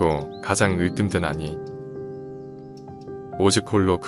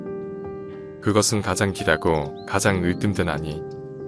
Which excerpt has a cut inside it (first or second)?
second